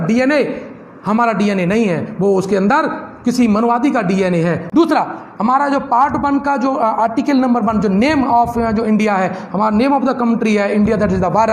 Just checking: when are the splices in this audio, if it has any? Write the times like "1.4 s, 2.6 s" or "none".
4.6 s